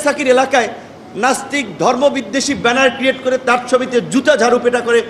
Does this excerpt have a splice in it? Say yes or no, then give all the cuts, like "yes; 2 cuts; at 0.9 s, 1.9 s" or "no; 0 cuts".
no; 0 cuts